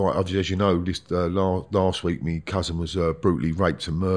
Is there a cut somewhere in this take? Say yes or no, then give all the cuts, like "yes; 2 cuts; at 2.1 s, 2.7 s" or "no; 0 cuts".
no; 0 cuts